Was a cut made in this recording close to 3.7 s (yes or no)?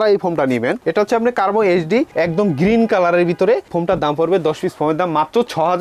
yes